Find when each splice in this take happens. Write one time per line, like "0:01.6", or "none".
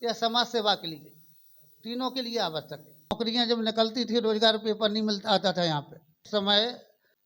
0:03.3
0:06.2